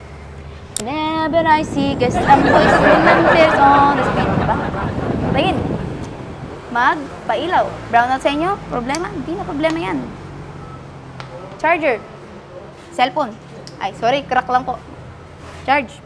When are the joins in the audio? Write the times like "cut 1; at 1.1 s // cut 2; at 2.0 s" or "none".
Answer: none

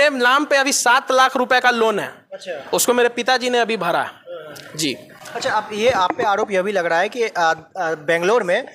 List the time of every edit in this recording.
none

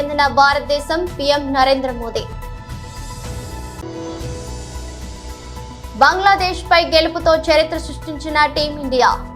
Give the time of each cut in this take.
cut 1; at 2.4 s // cut 2; at 3.8 s // cut 3; at 5.7 s

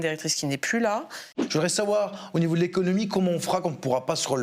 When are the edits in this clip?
cut 1; at 1.3 s

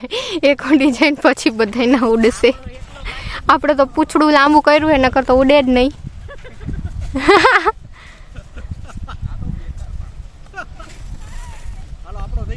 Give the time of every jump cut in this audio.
none

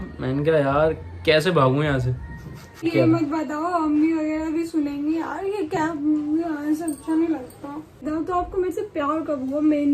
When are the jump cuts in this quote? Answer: cut 1; at 2.8 s // cut 2; at 8.1 s

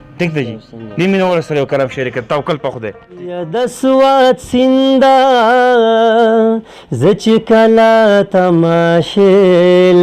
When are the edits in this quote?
cut 1; at 3.5 s

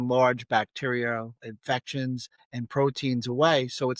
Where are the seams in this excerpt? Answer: cut 1; at 1.5 s // cut 2; at 2.4 s

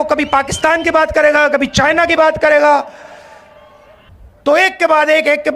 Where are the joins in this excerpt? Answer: cut 1; at 4.2 s

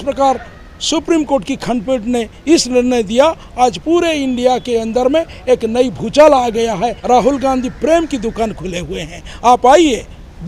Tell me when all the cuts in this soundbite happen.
cut 1; at 7.0 s

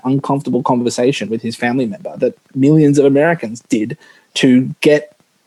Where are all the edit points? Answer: none

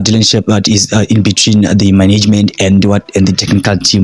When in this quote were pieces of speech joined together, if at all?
none

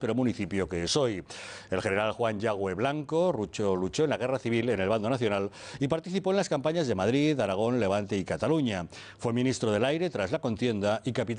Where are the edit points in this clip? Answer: cut 1; at 3.5 s

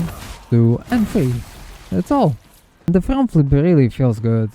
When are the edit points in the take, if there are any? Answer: cut 1; at 2.9 s

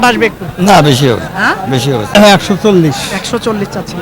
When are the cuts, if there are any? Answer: cut 1; at 2.1 s

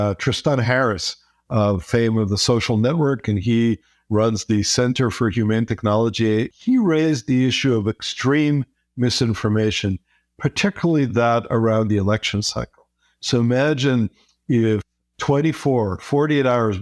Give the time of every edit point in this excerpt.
cut 1; at 6.5 s // cut 2; at 15.0 s

